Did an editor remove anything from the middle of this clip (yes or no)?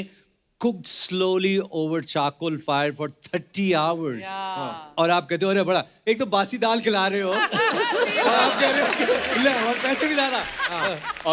no